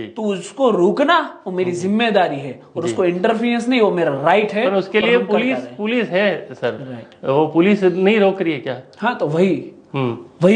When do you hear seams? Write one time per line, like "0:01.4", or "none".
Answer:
none